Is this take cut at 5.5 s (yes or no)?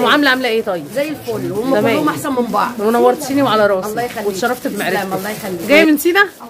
yes